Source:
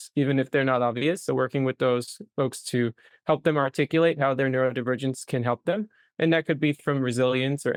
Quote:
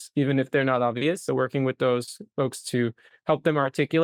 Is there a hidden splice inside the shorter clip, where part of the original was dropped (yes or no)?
no